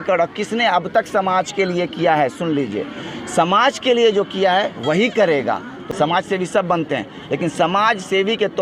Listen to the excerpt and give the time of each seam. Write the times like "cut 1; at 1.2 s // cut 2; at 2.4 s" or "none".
cut 1; at 5.8 s